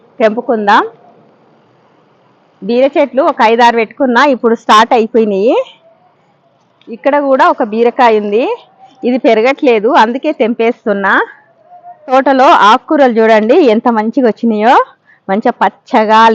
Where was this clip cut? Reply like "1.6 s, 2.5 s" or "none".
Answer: 12.1 s